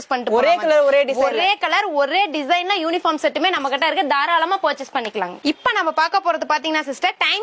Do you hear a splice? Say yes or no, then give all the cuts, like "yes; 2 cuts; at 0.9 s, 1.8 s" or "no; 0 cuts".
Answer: no; 0 cuts